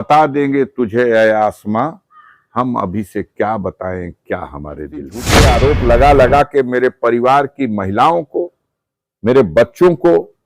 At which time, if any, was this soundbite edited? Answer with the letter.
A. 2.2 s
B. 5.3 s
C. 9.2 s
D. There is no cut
B